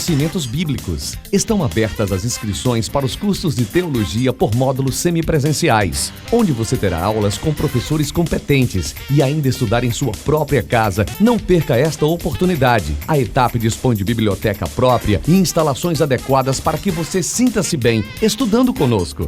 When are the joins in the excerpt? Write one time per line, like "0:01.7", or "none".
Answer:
none